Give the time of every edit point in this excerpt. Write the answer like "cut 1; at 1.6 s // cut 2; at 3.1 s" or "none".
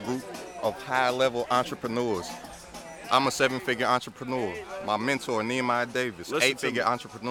none